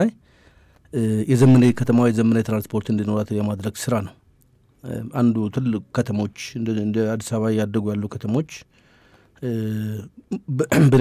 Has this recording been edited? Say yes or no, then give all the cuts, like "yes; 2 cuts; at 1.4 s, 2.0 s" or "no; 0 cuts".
no; 0 cuts